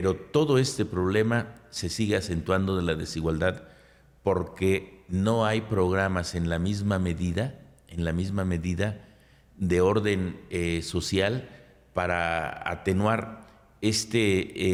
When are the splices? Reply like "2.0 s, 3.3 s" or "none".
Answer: none

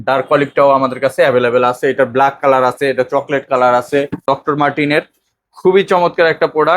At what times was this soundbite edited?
4.2 s

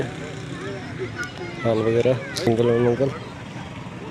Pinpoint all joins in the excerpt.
2.5 s

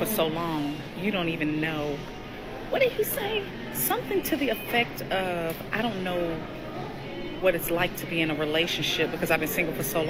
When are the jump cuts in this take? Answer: none

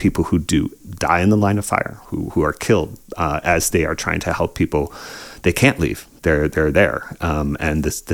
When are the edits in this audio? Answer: none

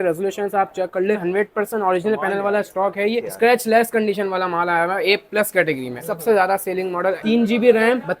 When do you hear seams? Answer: 1.2 s, 3.2 s, 6.0 s, 7.2 s

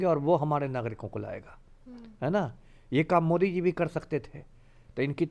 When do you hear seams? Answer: none

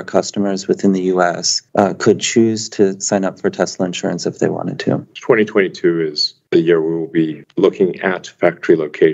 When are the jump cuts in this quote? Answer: none

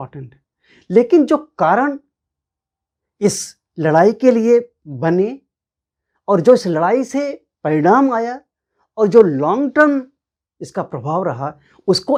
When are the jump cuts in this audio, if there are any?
none

